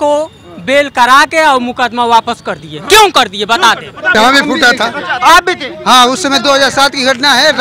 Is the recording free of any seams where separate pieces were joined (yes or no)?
no